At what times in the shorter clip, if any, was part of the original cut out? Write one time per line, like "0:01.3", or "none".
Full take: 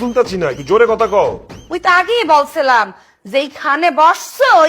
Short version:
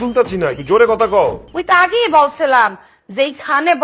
0:01.5